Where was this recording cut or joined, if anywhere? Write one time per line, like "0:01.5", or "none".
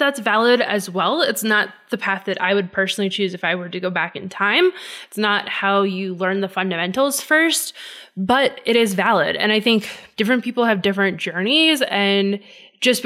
0:10.0